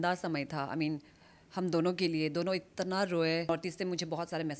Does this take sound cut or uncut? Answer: cut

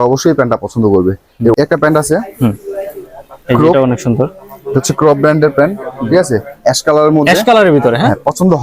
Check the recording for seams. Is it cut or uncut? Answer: cut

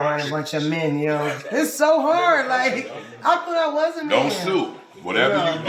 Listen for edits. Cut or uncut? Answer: uncut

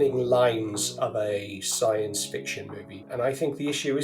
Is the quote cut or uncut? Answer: cut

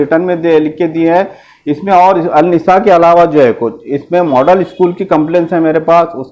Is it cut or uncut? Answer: uncut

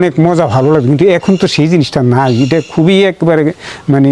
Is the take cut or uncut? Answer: uncut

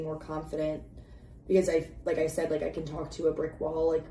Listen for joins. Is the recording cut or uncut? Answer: uncut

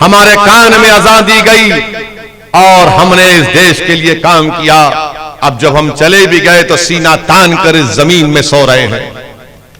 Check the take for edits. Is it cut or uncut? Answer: uncut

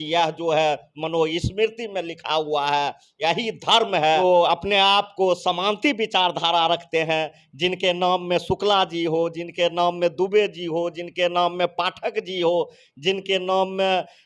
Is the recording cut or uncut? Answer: cut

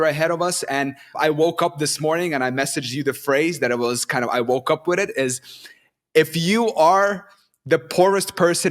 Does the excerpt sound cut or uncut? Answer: cut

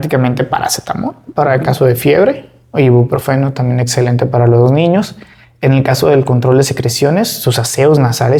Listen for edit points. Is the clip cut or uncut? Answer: uncut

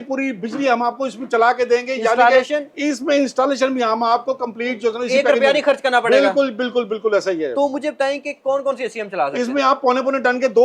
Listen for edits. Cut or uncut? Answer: uncut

